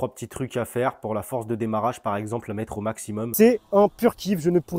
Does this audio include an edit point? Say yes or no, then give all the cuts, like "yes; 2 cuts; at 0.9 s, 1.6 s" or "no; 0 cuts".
yes; 1 cut; at 3.3 s